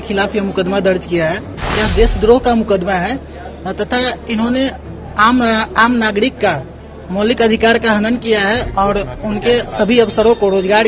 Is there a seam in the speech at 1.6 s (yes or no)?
yes